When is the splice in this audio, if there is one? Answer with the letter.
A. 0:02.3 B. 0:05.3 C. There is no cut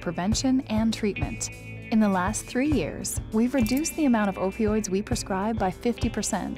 C